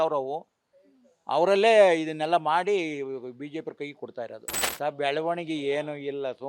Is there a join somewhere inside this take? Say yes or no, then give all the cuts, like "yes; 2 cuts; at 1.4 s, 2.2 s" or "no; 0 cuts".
yes; 1 cut; at 4.6 s